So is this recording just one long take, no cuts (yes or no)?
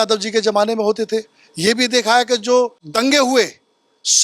no